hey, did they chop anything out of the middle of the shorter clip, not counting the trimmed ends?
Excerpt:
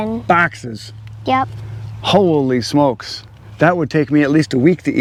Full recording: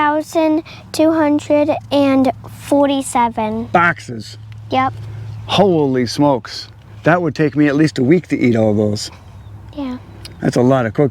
no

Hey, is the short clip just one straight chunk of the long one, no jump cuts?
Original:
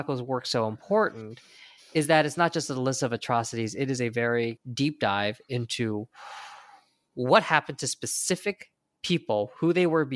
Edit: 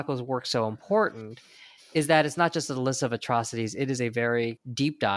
yes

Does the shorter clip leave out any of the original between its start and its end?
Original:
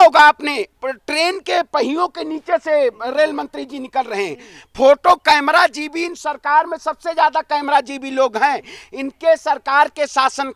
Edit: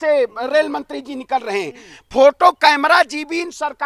no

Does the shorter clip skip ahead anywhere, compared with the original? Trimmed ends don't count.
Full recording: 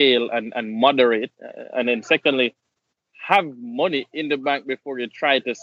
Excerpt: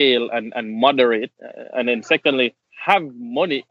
yes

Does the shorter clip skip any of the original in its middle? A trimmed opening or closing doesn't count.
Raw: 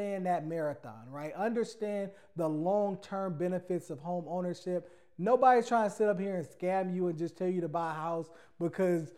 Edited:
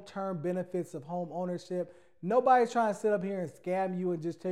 no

